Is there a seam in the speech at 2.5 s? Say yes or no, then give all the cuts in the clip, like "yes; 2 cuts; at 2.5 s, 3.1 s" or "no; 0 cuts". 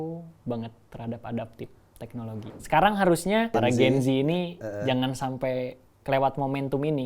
yes; 2 cuts; at 2.5 s, 3.5 s